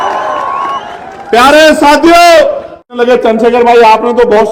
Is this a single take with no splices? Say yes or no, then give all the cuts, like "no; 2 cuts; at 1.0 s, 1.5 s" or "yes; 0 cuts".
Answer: no; 1 cut; at 2.9 s